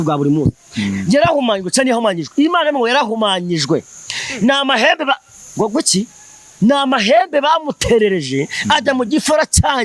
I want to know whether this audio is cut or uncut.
uncut